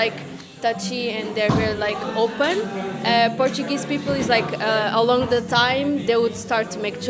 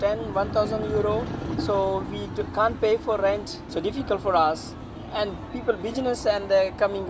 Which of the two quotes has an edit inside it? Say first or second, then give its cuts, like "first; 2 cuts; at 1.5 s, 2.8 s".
second; 1 cut; at 3.6 s